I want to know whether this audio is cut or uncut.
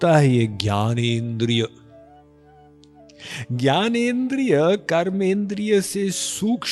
uncut